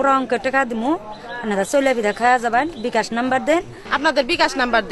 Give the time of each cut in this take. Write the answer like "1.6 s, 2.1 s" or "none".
3.8 s